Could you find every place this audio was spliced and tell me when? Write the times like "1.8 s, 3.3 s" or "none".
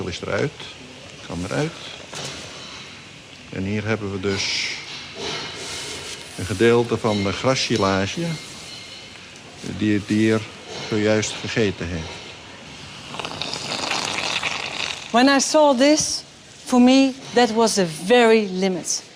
10.9 s